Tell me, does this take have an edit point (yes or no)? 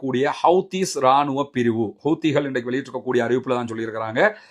no